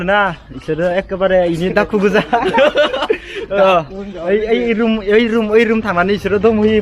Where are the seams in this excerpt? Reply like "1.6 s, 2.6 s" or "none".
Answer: none